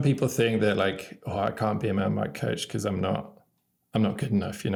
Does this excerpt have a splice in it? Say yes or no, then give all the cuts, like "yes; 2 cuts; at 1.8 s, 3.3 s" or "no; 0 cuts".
no; 0 cuts